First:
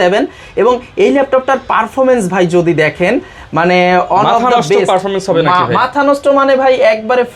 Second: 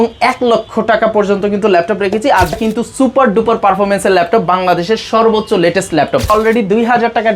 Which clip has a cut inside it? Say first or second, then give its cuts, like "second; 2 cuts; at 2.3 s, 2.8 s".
second; 2 cuts; at 2.5 s, 6.3 s